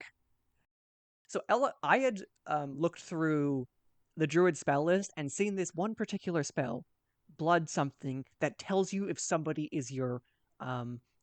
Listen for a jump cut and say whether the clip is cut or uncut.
cut